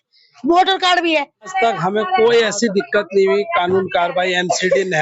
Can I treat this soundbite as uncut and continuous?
no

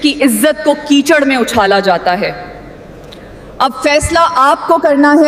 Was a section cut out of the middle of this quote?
no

